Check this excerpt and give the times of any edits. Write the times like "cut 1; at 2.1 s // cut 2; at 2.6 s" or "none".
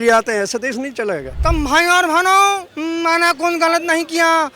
cut 1; at 1.3 s // cut 2; at 2.7 s